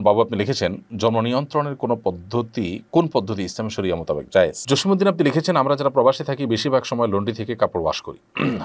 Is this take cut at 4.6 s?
yes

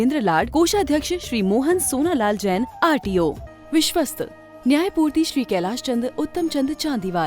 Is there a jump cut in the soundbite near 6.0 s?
no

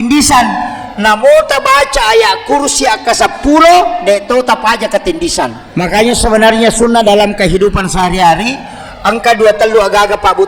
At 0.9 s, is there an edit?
no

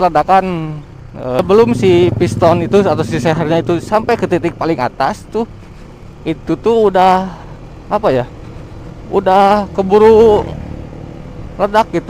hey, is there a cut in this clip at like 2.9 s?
no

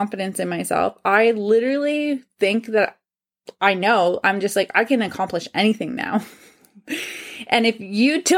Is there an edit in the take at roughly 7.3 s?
no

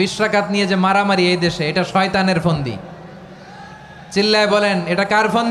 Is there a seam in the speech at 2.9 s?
no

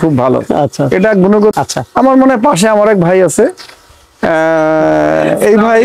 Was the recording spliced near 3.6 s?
no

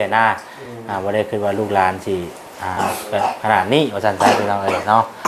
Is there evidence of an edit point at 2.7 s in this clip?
yes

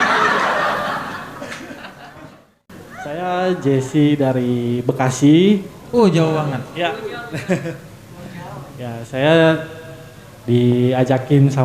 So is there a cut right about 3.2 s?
yes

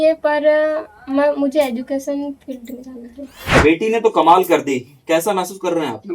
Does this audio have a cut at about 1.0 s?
no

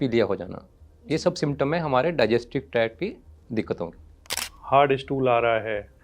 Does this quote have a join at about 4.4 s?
yes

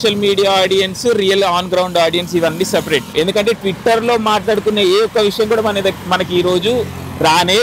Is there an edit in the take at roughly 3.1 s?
yes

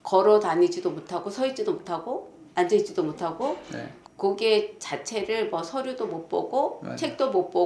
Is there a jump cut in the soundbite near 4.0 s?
yes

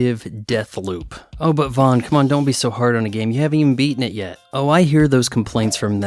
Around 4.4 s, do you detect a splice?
yes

